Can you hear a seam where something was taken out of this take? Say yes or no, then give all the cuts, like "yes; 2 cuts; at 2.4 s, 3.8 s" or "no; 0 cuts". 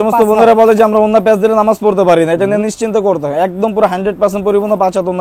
no; 0 cuts